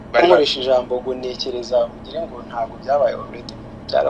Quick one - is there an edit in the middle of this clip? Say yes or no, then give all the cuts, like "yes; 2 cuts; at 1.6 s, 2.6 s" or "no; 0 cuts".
no; 0 cuts